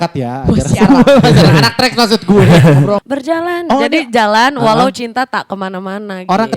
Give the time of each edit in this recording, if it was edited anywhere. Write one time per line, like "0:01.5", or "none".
0:03.0